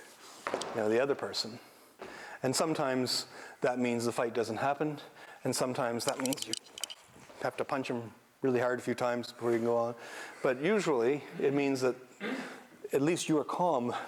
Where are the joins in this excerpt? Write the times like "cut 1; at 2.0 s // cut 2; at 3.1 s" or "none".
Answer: none